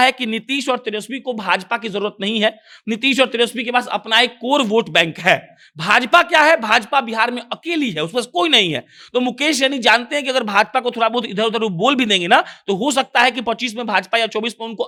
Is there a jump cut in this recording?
no; 0 cuts

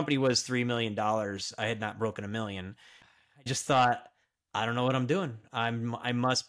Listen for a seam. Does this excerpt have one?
yes; 1 cut; at 3.2 s

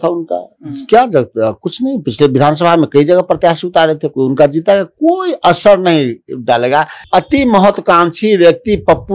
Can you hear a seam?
yes; 1 cut; at 7.0 s

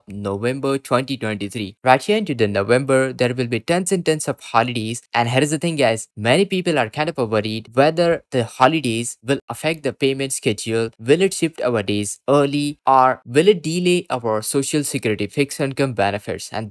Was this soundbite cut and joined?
yes; 1 cut; at 1.8 s

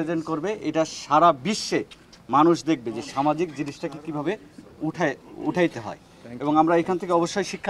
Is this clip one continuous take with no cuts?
yes; 0 cuts

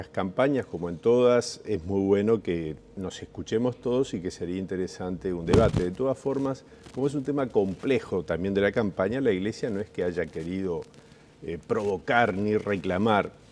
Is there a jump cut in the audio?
yes; 1 cut; at 8.3 s

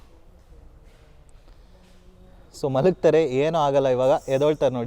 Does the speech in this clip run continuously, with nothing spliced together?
yes; 0 cuts

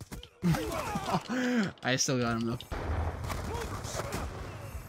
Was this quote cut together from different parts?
no; 0 cuts

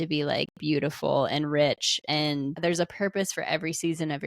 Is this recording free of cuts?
no; 1 cut; at 2.6 s

